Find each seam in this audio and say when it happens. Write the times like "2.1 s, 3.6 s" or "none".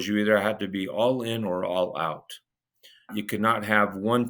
3.1 s